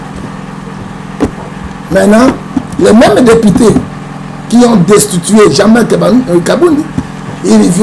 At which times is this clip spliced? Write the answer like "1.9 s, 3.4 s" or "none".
none